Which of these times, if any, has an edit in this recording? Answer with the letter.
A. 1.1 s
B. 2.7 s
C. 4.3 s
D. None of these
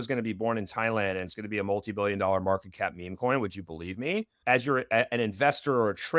C